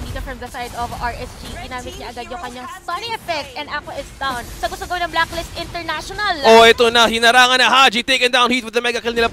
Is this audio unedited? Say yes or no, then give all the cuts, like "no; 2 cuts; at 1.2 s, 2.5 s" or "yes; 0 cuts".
no; 1 cut; at 4.5 s